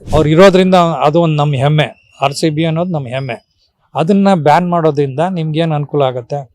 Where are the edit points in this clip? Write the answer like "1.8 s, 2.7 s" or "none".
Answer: none